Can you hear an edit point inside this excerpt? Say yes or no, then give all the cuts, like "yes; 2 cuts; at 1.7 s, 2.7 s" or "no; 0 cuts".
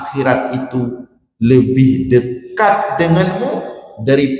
no; 0 cuts